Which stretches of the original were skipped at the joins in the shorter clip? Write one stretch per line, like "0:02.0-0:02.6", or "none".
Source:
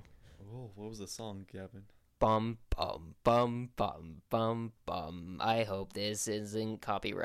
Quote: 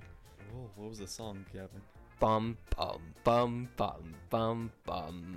none